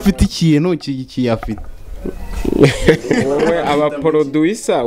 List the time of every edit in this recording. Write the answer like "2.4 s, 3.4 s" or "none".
3.3 s